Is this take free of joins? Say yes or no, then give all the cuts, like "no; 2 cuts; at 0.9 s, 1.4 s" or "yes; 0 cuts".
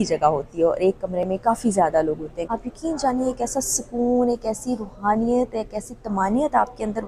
no; 1 cut; at 2.4 s